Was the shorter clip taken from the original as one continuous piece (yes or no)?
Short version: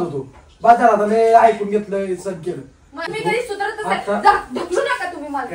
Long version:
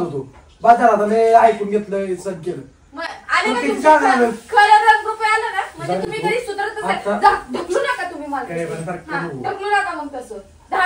no